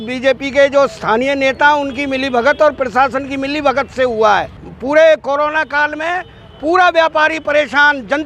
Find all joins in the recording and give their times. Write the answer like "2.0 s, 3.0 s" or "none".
4.6 s